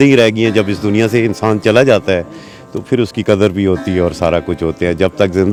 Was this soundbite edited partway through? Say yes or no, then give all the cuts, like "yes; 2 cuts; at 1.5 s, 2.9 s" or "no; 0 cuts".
no; 0 cuts